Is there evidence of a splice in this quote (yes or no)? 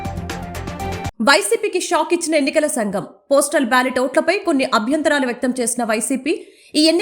no